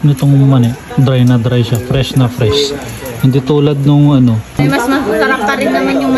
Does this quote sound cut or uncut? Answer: cut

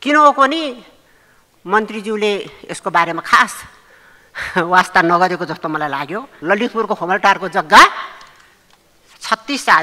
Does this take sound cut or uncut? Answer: cut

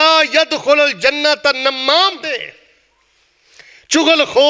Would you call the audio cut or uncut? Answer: cut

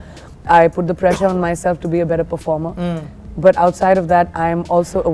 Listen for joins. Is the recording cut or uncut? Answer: uncut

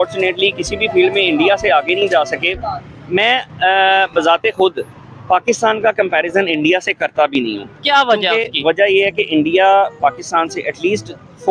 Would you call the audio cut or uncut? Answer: uncut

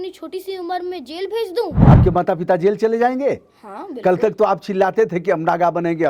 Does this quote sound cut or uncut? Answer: cut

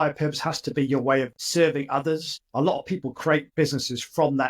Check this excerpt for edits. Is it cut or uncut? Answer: cut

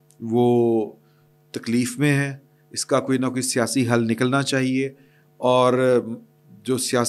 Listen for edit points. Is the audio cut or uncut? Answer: uncut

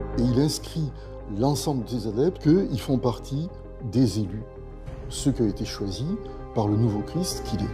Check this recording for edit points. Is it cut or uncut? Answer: cut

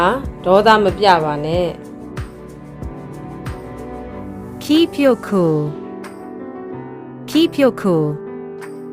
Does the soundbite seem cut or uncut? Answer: cut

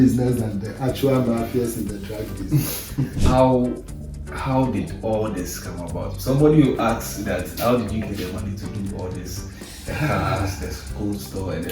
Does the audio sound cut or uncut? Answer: cut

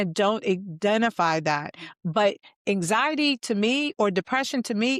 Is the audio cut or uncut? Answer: uncut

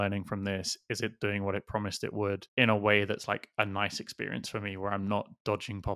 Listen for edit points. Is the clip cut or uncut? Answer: uncut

